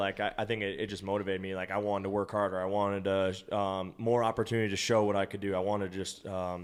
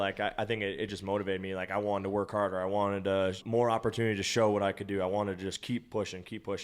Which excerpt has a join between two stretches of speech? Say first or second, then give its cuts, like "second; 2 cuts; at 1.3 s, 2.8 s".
second; 2 cuts; at 3.4 s, 5.6 s